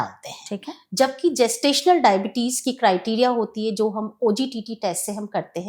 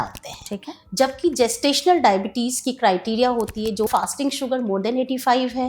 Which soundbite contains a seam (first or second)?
second